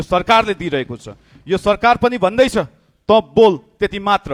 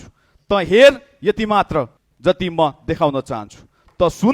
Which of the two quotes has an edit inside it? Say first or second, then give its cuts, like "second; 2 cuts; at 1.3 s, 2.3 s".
second; 1 cut; at 2.0 s